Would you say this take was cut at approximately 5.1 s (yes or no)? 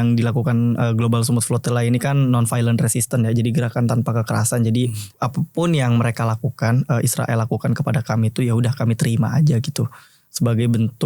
yes